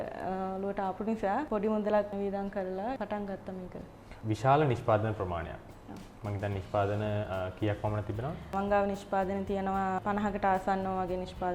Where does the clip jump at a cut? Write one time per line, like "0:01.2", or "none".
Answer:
0:04.2
0:08.5